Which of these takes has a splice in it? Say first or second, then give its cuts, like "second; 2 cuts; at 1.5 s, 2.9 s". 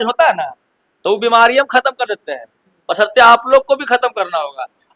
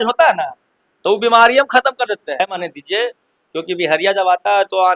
second; 1 cut; at 2.5 s